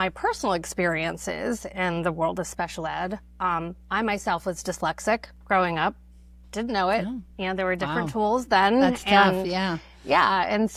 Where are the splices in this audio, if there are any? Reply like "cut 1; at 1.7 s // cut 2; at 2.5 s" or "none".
none